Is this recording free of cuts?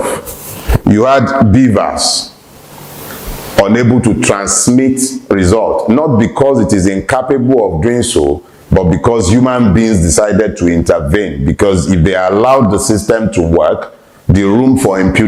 yes; 0 cuts

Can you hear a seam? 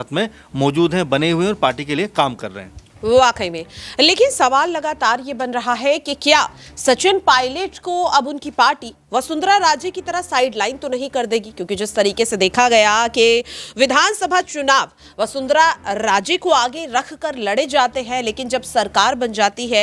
no; 0 cuts

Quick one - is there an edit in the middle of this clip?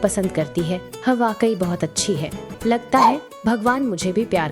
yes; 1 cut; at 2.5 s

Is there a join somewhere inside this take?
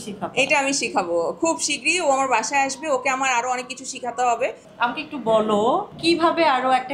yes; 2 cuts; at 4.6 s, 5.9 s

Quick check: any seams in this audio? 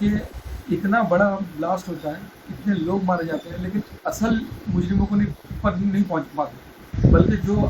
no; 0 cuts

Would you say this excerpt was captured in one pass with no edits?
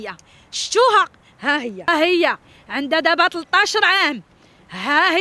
no; 1 cut; at 1.9 s

